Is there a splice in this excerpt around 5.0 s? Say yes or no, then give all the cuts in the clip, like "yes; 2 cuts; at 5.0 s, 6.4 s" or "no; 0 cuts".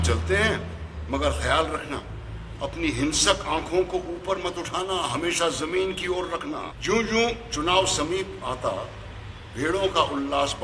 no; 1 cut; at 6.7 s